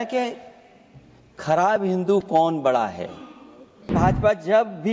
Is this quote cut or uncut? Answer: cut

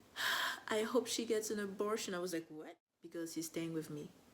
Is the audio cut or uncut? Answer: cut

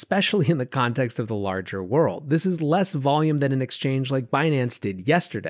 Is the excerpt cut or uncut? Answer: uncut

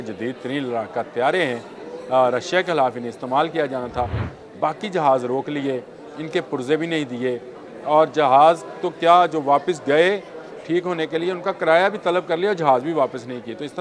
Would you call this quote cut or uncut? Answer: uncut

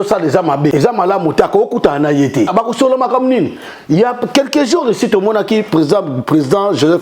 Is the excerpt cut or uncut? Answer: cut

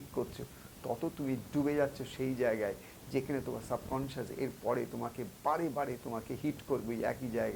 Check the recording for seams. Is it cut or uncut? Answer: uncut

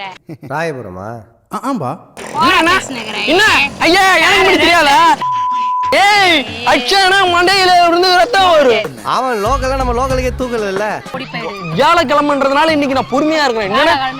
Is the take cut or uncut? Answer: cut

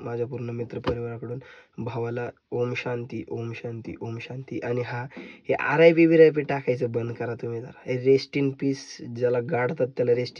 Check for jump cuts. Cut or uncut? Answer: uncut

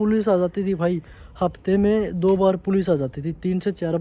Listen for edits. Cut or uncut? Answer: uncut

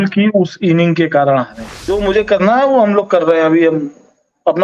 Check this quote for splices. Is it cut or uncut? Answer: cut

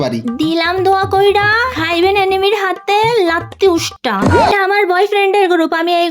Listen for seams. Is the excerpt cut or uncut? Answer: cut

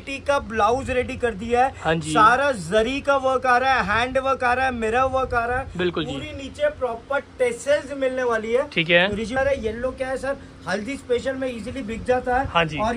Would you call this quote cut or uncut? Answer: cut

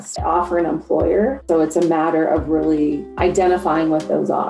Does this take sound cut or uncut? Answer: cut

